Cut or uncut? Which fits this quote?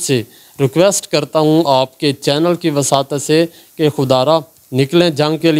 uncut